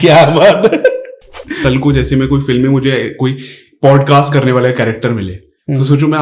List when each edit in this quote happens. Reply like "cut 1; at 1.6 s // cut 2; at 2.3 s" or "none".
cut 1; at 1.6 s